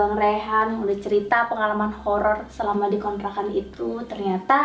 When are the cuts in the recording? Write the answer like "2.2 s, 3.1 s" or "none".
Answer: none